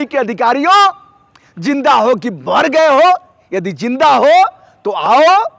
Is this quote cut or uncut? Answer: uncut